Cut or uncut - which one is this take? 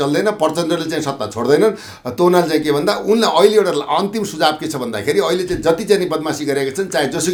uncut